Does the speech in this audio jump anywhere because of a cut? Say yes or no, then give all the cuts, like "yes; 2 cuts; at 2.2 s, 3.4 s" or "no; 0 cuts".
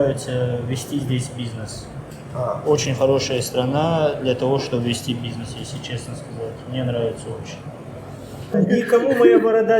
yes; 1 cut; at 8.6 s